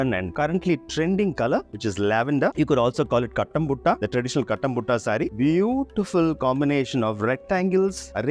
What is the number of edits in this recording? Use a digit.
2